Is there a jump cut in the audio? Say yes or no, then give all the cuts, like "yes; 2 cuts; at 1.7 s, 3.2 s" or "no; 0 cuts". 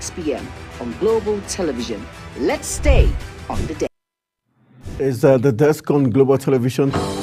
yes; 1 cut; at 4.3 s